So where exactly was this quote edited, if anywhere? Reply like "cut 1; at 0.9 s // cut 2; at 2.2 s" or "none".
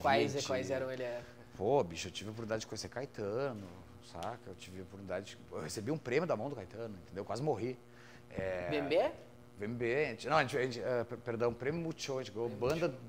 none